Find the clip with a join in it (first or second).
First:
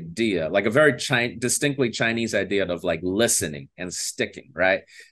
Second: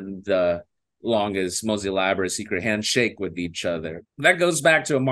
second